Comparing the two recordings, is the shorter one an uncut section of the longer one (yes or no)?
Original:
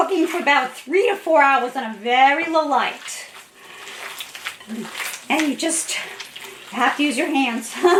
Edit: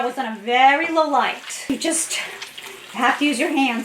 no